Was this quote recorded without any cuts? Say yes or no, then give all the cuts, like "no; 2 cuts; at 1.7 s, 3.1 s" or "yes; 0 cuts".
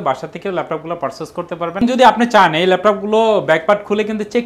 no; 1 cut; at 1.8 s